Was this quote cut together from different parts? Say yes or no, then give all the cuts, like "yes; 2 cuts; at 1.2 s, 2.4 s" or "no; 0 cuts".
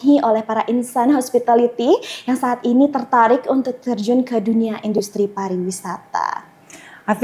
no; 0 cuts